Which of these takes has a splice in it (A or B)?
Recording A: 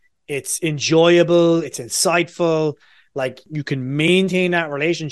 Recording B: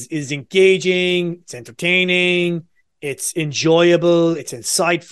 A